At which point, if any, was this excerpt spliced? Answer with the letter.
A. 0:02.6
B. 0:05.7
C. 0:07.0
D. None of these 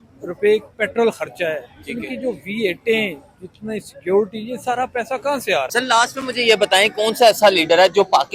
B